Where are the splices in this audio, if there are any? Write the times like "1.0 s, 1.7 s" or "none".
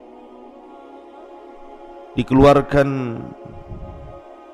2.1 s